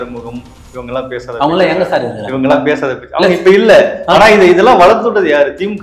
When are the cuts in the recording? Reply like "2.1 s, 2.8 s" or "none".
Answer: none